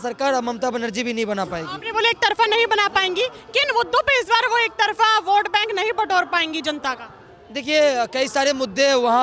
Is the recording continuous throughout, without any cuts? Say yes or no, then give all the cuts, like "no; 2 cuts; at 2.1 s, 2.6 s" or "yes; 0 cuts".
yes; 0 cuts